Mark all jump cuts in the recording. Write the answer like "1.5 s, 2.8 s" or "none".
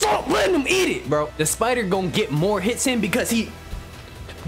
1.3 s